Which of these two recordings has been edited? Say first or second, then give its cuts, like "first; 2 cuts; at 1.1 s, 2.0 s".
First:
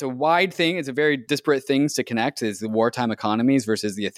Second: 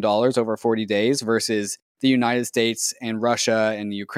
first; 1 cut; at 1.2 s